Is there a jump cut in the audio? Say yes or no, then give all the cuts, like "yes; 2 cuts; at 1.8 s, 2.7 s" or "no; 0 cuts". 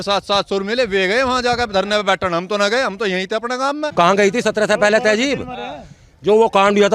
yes; 1 cut; at 3.9 s